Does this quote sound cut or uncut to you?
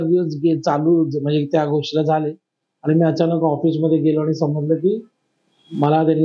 uncut